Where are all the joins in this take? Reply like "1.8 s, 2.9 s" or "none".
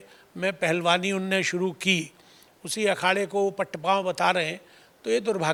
none